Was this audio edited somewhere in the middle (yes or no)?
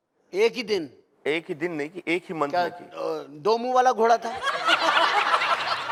no